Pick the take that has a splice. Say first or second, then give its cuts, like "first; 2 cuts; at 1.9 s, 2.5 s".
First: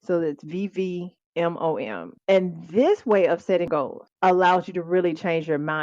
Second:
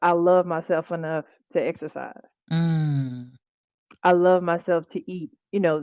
first; 3 cuts; at 1.2 s, 2.1 s, 3.7 s